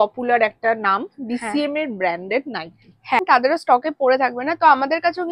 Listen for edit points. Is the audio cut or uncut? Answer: cut